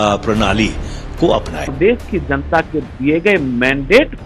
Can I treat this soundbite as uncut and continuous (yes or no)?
no